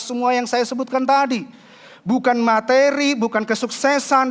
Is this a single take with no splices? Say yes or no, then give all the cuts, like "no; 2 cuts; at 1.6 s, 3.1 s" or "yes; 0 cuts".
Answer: yes; 0 cuts